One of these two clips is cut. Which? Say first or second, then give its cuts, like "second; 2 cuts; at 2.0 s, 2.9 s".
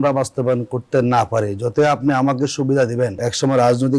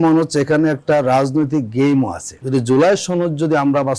second; 1 cut; at 2.4 s